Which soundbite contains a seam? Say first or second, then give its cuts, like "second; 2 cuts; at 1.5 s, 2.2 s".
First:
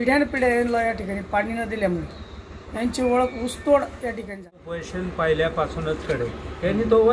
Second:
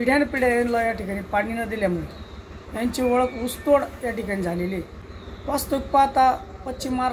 first; 1 cut; at 4.6 s